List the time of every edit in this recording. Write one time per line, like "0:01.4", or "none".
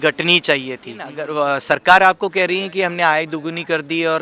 0:01.1